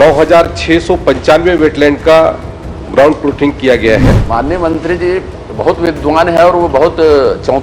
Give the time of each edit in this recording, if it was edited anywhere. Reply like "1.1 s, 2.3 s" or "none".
4.2 s